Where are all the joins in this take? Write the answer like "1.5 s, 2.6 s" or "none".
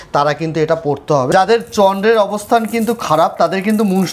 1.3 s